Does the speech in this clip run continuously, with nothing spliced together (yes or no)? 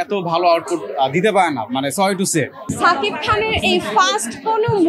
no